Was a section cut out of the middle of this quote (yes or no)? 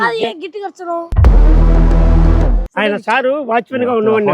yes